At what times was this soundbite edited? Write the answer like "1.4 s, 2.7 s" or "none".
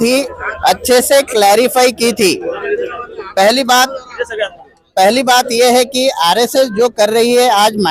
none